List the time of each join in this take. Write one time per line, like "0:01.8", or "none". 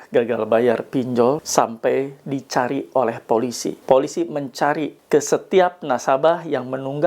0:01.4
0:03.7
0:04.9